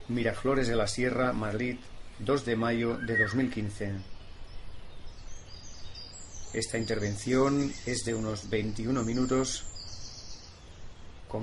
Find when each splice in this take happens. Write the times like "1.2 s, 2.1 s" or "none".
6.5 s

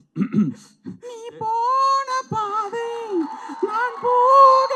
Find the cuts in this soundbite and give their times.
none

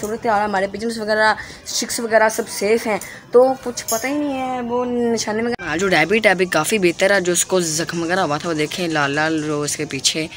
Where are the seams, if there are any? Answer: 5.5 s

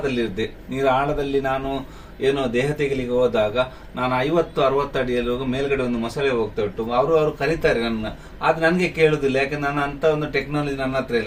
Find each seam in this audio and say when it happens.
none

